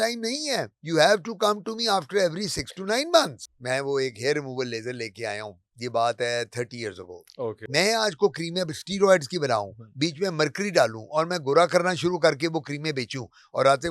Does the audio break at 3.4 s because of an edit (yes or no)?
yes